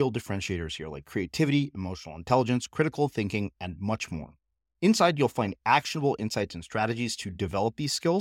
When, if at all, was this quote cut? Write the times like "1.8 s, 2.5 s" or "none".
none